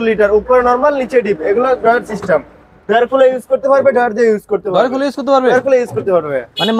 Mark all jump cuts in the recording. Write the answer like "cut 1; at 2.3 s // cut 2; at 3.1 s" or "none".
none